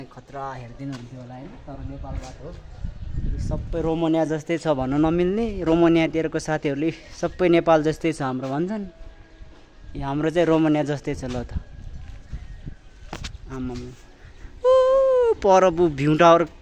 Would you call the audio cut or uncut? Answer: uncut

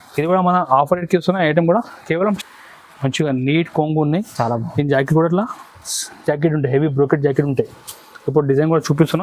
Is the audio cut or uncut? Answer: cut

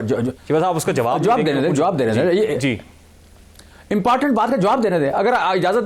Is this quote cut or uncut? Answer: uncut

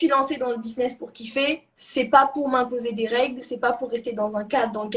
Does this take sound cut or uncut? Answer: cut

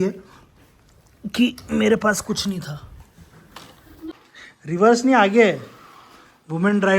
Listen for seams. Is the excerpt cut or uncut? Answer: cut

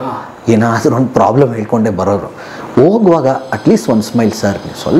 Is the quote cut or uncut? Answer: uncut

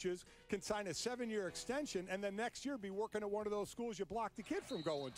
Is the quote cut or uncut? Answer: uncut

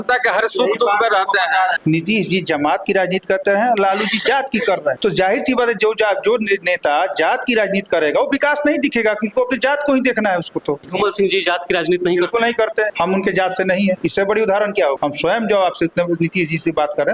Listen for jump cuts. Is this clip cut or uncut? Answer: cut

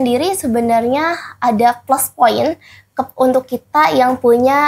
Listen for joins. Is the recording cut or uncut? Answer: uncut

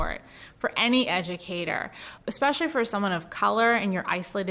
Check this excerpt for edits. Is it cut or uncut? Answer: cut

